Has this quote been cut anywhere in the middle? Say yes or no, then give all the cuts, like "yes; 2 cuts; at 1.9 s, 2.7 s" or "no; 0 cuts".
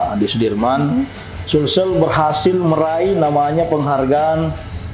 no; 0 cuts